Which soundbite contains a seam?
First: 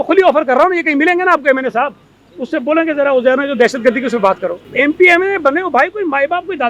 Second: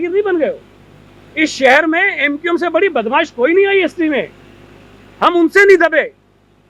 first; 1 cut; at 4.7 s

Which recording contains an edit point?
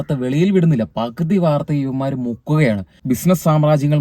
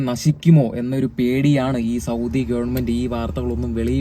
first; 1 cut; at 3.0 s

